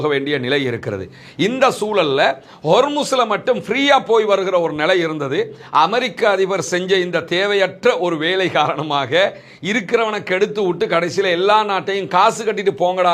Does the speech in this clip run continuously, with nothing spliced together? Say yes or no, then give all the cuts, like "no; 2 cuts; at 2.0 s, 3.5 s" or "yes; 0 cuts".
yes; 0 cuts